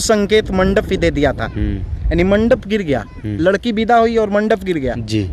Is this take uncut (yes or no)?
yes